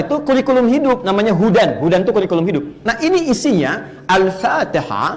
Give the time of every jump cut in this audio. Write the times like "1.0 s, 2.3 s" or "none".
2.8 s